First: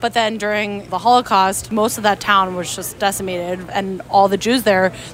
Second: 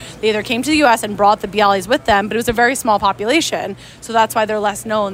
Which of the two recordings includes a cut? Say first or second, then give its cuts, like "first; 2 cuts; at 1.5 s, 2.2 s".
first; 3 cuts; at 0.9 s, 1.7 s, 3.7 s